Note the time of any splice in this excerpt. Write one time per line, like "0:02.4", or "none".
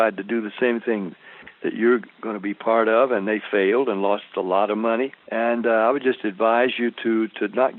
0:05.2